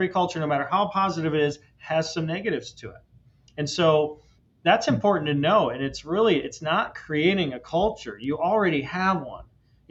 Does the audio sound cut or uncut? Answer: uncut